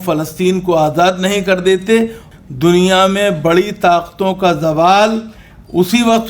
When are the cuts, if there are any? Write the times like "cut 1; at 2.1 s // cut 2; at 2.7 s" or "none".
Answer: cut 1; at 2.2 s